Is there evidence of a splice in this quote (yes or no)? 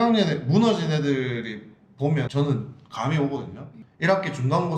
no